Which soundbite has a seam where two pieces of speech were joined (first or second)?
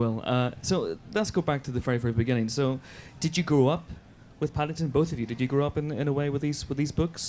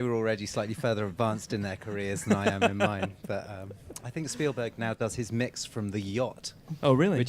second